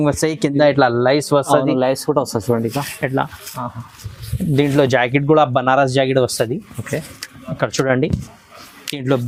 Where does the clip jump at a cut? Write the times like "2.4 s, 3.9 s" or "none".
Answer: none